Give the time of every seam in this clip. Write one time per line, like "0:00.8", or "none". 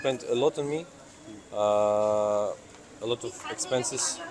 none